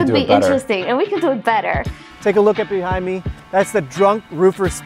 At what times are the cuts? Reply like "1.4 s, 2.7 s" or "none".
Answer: 2.0 s